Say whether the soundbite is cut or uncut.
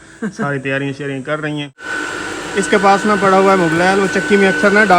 cut